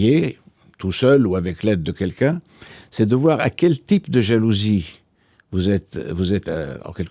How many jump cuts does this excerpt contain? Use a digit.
0